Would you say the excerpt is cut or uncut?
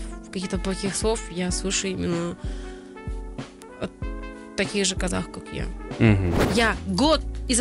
cut